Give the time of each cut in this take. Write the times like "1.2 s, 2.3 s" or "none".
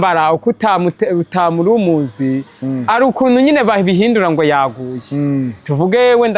none